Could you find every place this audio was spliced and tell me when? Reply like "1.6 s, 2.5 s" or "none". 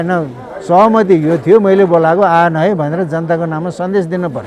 none